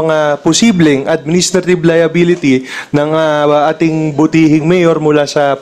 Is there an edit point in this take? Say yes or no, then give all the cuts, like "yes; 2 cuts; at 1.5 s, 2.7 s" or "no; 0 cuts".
no; 0 cuts